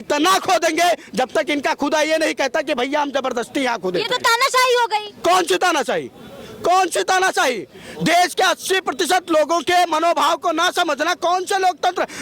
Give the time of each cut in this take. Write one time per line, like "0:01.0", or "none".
none